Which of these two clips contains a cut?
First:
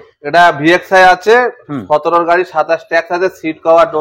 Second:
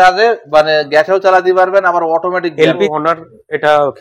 second; 1 cut; at 2.9 s

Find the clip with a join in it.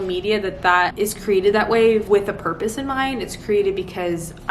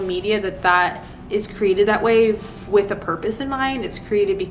first; 2 cuts; at 0.9 s, 2.0 s

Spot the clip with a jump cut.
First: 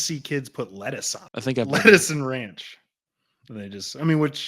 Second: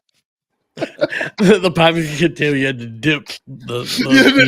first; 1 cut; at 1.2 s

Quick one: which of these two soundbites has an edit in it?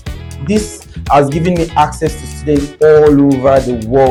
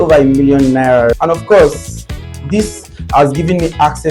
second; 1 cut; at 1.1 s

